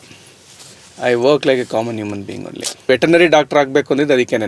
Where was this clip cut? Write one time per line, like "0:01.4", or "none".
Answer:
0:02.9

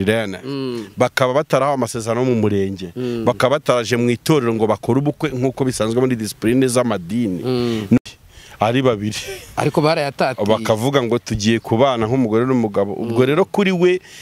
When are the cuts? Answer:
0:08.0

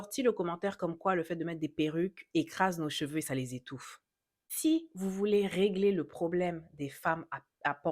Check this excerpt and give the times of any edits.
0:04.5

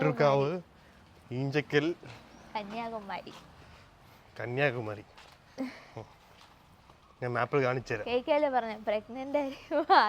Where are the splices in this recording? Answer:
none

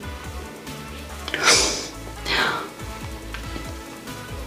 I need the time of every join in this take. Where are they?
none

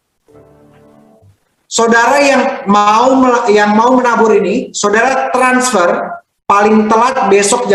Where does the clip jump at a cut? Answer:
none

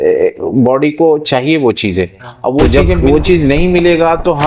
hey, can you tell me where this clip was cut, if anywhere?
0:02.6

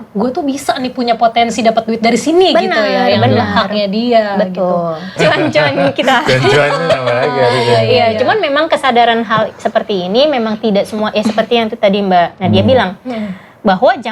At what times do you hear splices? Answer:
0:05.1

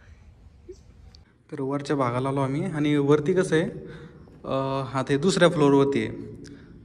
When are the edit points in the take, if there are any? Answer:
0:01.3

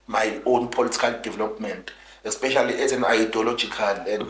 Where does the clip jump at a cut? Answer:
none

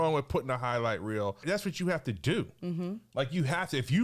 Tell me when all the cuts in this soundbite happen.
0:01.4

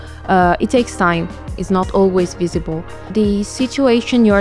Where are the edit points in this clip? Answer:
0:03.1

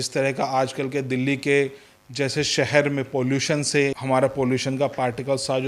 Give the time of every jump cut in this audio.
0:04.0

